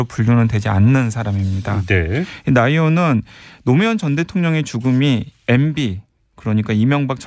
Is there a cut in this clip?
no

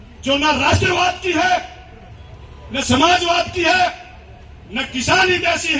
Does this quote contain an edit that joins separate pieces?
no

